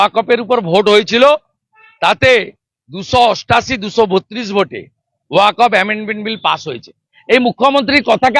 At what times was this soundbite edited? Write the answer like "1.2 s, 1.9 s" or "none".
none